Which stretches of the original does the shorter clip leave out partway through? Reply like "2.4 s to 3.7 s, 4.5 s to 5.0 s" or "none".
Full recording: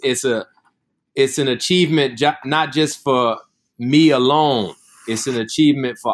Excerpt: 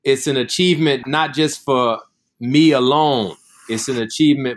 2.1 s to 2.4 s